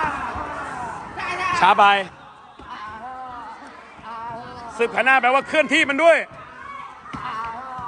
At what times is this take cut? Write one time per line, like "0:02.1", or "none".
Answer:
0:02.2